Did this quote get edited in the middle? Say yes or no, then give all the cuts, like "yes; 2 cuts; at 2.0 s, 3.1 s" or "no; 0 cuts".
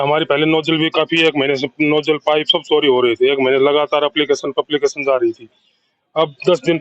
no; 0 cuts